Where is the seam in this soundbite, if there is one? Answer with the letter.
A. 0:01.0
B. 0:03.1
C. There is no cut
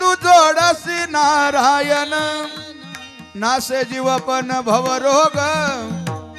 C